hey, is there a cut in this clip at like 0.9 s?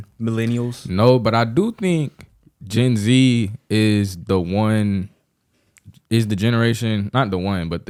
no; 0 cuts

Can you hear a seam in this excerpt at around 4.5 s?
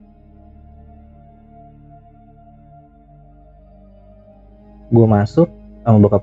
yes; 1 cut; at 4.5 s

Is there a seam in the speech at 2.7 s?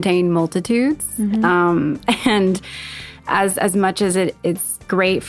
no; 0 cuts

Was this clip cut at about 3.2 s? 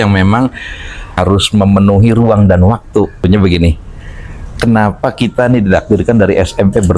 yes; 2 cuts; at 1.1 s, 3.2 s

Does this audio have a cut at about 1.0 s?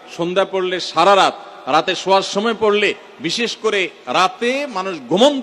no; 0 cuts

